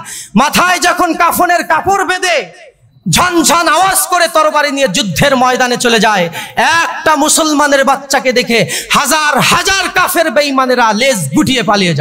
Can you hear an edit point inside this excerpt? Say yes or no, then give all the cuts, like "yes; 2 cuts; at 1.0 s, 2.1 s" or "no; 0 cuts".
no; 0 cuts